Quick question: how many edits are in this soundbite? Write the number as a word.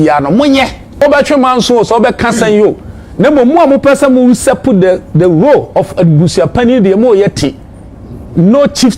one